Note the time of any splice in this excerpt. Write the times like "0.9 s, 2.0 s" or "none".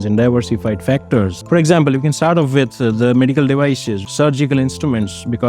1.4 s, 3.9 s